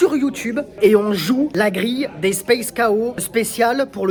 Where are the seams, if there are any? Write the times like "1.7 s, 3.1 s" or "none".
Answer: none